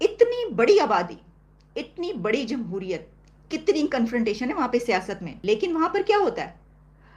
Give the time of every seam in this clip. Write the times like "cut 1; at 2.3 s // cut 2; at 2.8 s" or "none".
cut 1; at 5.3 s